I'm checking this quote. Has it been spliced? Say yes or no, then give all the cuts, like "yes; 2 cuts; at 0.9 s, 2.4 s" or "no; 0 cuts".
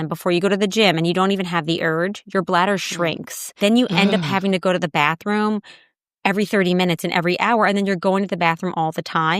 yes; 1 cut; at 3.5 s